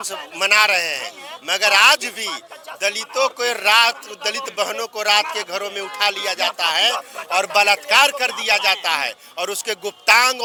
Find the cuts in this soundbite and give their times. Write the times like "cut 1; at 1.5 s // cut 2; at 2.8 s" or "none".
none